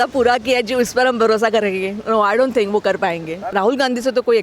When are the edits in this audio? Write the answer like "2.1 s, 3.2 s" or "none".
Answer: 3.4 s